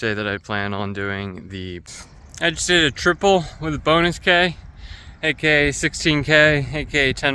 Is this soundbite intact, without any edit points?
no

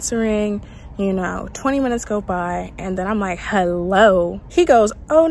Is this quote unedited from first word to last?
no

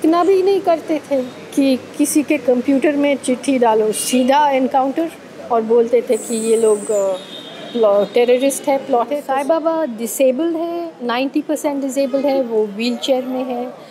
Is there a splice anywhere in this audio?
yes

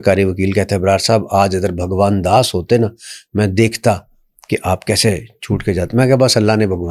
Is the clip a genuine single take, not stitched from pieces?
yes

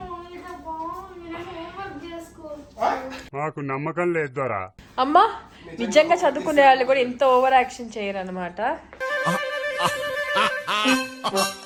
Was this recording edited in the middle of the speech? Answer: no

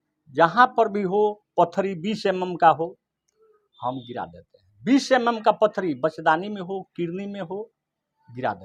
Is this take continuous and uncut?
yes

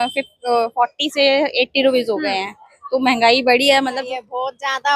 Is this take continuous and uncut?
no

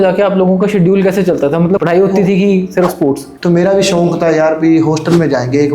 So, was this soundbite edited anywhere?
yes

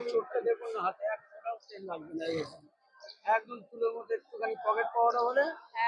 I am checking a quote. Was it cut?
no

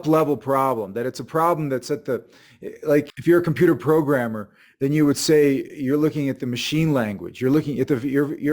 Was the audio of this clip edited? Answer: yes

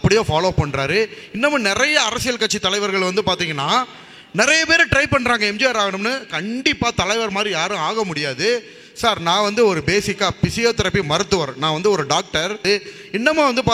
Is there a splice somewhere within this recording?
yes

